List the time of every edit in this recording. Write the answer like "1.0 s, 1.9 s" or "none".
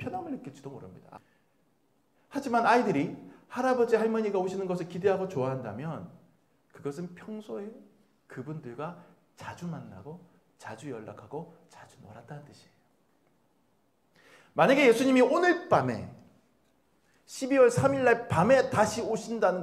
1.2 s

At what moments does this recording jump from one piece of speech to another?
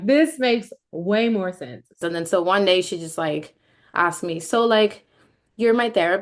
2.0 s

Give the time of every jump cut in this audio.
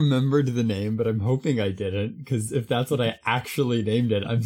none

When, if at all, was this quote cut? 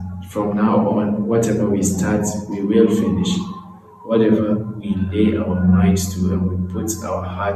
none

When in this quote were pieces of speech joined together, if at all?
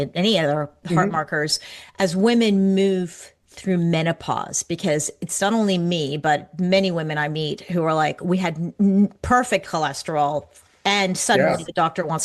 none

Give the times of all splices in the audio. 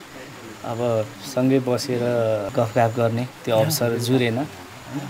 2.5 s

